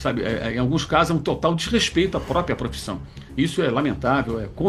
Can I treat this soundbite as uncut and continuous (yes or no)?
yes